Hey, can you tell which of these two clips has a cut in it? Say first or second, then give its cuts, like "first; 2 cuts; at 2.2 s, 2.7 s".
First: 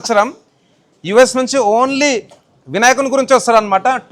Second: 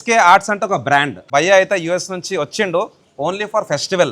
second; 1 cut; at 1.3 s